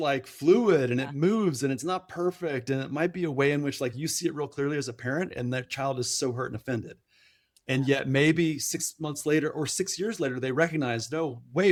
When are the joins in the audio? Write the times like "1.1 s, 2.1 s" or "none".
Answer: none